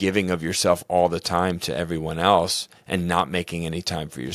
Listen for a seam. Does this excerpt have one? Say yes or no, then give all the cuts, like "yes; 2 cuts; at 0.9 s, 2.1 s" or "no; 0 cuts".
no; 0 cuts